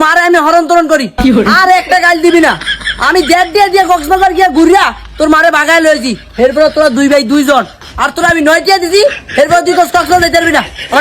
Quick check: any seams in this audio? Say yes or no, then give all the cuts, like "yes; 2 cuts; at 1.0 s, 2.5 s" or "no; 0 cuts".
no; 0 cuts